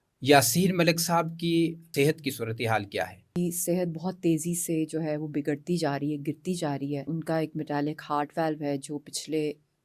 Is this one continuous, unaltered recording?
no; 3 cuts; at 1.8 s, 3.3 s, 7.1 s

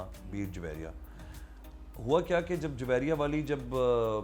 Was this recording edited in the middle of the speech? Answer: no; 0 cuts

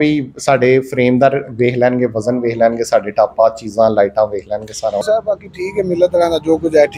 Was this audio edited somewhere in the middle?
yes; 1 cut; at 5.0 s

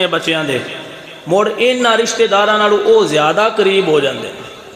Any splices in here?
no; 0 cuts

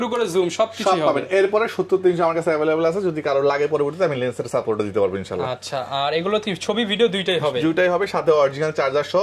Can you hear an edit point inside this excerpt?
no; 0 cuts

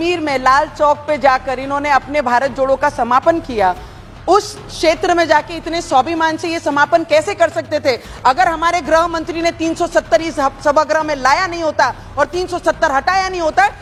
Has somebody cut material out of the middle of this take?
no; 0 cuts

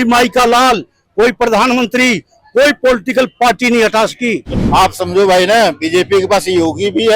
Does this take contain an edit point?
yes; 1 cut; at 4.6 s

